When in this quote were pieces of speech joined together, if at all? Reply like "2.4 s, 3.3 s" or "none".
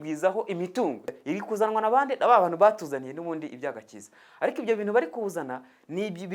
1.1 s